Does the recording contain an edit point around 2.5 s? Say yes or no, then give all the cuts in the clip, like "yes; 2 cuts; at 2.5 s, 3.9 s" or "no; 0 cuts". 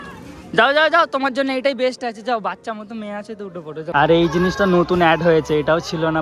no; 1 cut; at 3.9 s